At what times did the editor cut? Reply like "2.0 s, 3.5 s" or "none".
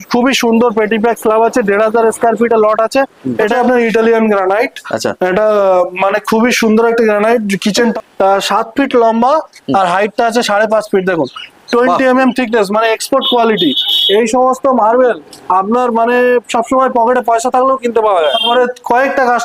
3.5 s, 7.8 s, 18.4 s